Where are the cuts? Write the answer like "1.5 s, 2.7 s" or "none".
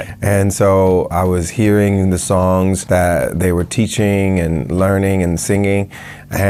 none